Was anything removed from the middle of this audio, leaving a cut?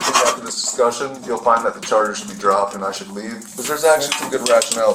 yes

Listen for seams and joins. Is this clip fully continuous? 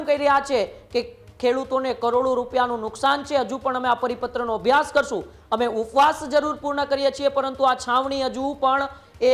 yes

